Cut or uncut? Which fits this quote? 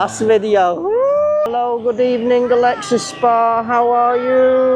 cut